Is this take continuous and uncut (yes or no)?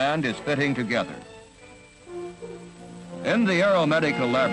no